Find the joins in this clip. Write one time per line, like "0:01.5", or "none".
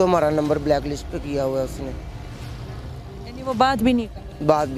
none